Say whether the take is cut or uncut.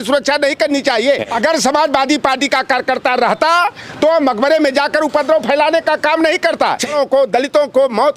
cut